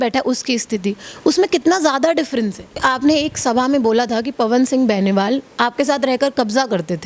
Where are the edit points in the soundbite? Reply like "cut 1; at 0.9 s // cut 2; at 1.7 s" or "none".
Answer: cut 1; at 2.8 s